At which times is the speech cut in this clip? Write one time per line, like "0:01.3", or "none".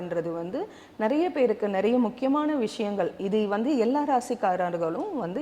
none